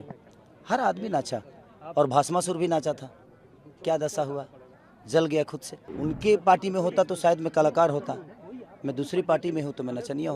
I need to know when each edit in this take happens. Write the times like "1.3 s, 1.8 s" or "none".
5.8 s